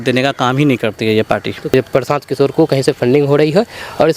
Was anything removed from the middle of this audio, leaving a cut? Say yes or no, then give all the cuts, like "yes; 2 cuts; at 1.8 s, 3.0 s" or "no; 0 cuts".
yes; 1 cut; at 1.7 s